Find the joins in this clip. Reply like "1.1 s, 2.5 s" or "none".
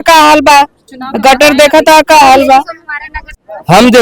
none